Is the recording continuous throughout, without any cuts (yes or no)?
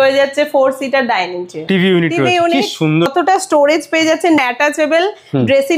no